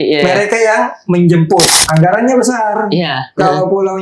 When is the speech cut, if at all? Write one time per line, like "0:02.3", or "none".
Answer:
0:01.7